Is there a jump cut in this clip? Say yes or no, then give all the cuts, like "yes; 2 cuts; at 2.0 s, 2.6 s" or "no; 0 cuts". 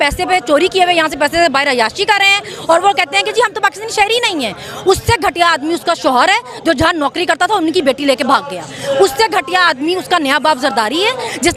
no; 0 cuts